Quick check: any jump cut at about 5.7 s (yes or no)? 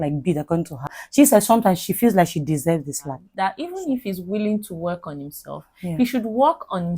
no